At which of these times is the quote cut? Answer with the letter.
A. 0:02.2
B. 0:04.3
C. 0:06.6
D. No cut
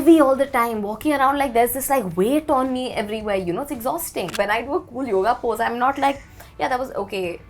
B